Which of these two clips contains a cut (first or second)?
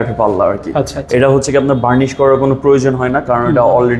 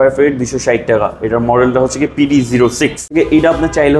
second